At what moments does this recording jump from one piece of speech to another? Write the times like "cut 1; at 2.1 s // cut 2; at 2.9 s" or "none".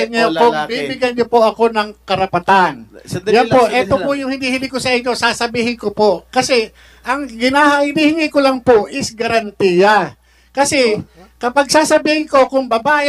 none

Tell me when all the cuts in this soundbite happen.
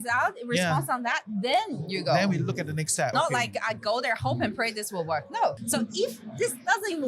cut 1; at 3.1 s // cut 2; at 5.6 s

